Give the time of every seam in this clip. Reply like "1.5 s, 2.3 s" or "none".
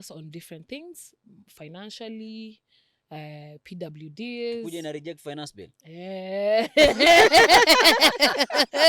none